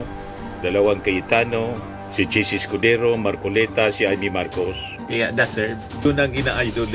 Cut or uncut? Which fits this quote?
cut